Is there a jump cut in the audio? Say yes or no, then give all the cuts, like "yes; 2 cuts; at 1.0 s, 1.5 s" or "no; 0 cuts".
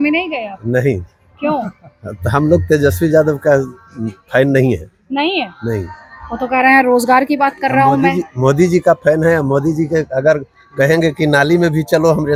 no; 0 cuts